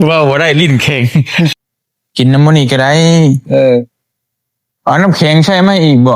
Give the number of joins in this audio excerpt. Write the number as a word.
one